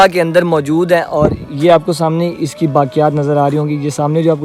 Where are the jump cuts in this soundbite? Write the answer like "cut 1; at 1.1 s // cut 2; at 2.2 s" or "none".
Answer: none